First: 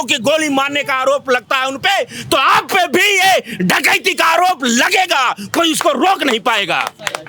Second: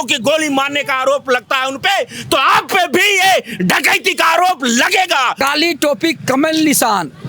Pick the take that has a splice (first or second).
second